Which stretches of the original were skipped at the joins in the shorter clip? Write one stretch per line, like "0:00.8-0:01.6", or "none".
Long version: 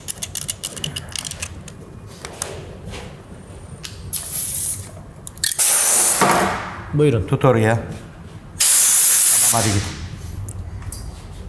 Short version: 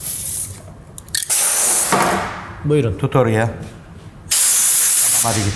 none